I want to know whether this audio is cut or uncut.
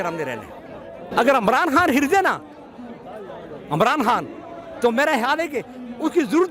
cut